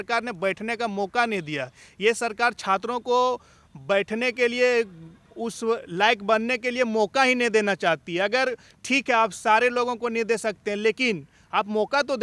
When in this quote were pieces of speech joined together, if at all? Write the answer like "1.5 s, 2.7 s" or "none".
none